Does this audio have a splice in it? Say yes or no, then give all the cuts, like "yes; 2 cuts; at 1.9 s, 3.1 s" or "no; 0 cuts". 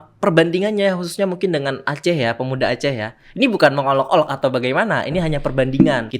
no; 0 cuts